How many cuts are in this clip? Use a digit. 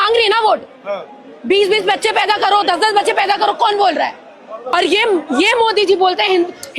1